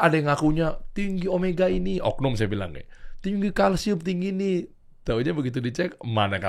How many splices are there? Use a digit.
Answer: 0